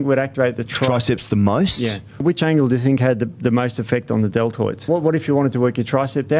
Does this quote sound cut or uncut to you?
cut